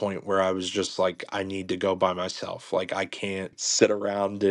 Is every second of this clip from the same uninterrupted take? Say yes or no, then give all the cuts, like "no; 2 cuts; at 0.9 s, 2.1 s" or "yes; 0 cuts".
no; 1 cut; at 3.6 s